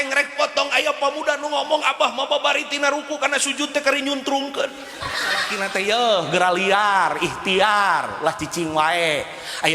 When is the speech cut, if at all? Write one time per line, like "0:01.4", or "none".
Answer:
0:05.6